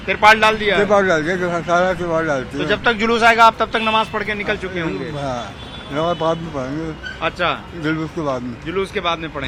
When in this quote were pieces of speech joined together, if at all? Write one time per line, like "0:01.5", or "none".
none